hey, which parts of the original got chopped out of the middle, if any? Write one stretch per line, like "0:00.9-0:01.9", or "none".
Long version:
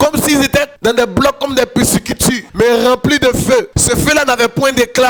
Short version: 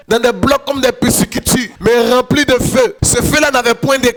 none